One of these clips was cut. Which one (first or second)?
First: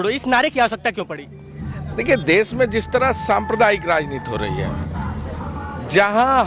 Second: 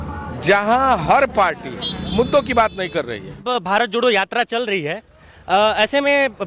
second